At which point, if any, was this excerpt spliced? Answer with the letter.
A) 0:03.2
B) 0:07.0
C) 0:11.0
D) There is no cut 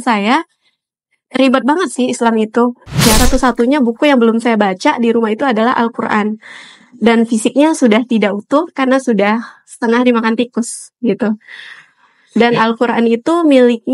A